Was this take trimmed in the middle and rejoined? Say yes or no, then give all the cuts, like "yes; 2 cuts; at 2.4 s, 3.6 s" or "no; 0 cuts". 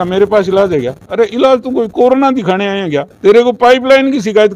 no; 0 cuts